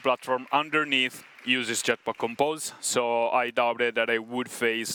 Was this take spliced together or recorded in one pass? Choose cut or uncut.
uncut